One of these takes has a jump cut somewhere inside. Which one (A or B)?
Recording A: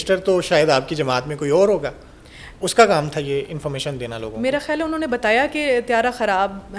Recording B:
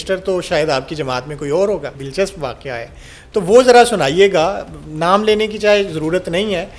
B